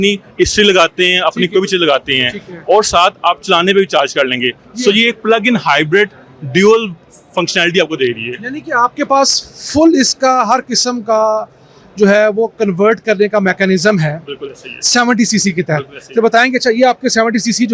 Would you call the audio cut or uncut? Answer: uncut